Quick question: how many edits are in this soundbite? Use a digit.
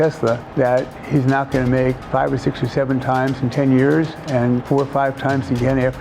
3